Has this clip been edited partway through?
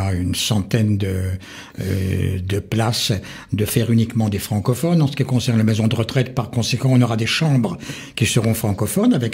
no; 0 cuts

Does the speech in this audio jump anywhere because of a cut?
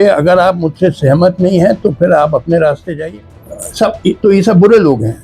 yes; 1 cut; at 3.0 s

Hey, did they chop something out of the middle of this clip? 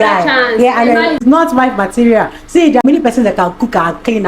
yes; 2 cuts; at 1.2 s, 2.8 s

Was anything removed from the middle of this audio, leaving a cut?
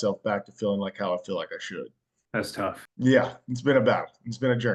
no; 0 cuts

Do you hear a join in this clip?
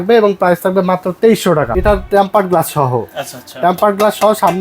yes; 1 cut; at 1.7 s

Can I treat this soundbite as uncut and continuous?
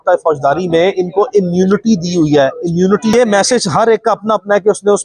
no; 1 cut; at 3.1 s

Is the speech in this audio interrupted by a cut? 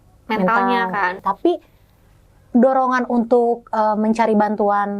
yes; 1 cut; at 1.2 s

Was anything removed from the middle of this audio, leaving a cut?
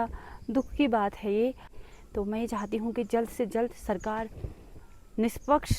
yes; 1 cut; at 1.8 s

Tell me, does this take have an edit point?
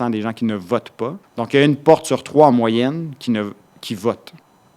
yes; 1 cut; at 1.2 s

